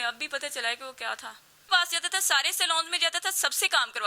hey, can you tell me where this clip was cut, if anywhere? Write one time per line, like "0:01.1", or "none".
0:01.6

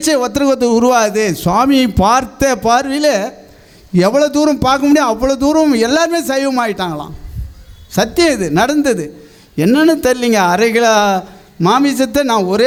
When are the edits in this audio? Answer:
none

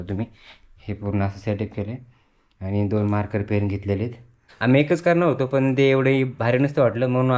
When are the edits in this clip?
0:04.4

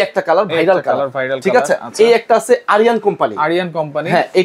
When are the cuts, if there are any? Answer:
none

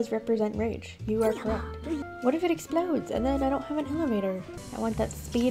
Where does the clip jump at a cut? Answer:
0:02.0
0:04.6

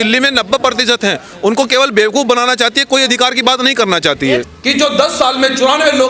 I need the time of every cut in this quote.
0:04.5

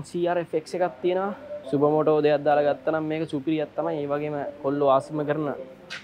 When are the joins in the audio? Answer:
0:01.5

